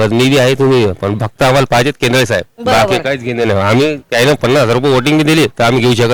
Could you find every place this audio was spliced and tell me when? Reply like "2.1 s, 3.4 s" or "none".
none